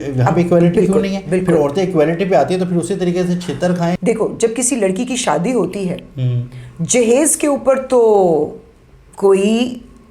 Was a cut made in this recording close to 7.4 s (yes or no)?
no